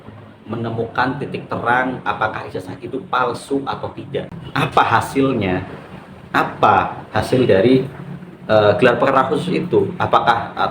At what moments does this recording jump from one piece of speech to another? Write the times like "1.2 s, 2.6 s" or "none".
4.4 s